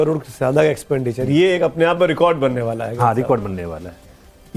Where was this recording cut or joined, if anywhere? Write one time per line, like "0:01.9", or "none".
0:00.9